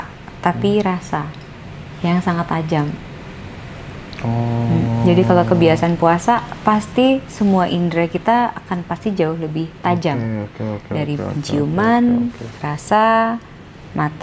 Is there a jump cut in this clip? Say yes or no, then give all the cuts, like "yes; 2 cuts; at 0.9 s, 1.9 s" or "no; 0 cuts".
no; 0 cuts